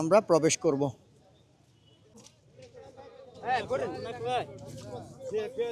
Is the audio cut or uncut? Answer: cut